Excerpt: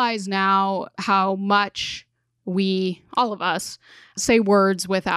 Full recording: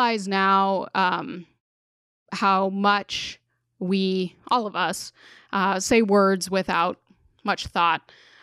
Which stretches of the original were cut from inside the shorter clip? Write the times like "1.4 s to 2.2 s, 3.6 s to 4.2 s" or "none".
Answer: 0.9 s to 2.2 s, 5.5 s to 5.8 s